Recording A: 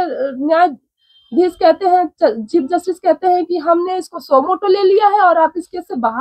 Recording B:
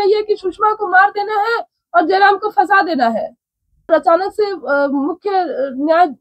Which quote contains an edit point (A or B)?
B